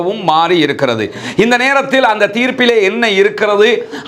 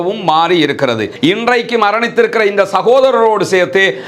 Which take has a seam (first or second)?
second